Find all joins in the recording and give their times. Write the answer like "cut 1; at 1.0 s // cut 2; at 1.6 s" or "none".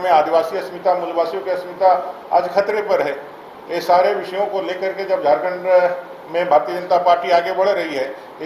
none